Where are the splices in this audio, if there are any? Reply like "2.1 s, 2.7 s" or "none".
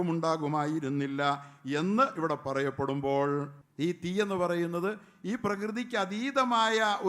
3.6 s